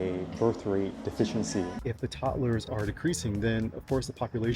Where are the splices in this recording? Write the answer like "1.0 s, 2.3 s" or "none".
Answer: 1.7 s

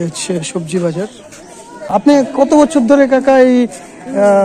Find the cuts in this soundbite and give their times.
1.9 s

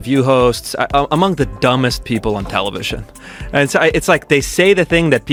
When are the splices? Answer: none

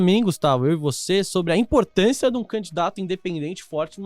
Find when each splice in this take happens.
none

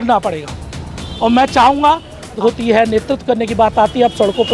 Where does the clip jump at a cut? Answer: 2.4 s

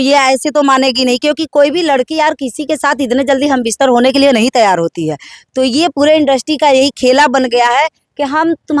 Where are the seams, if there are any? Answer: none

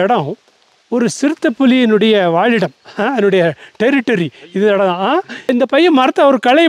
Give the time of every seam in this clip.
5.3 s

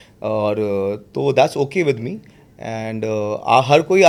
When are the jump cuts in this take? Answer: none

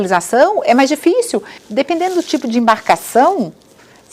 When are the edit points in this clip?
1.6 s

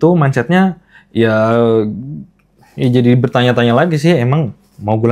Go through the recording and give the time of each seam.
none

